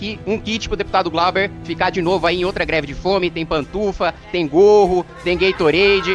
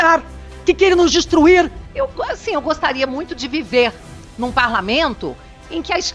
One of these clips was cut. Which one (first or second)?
second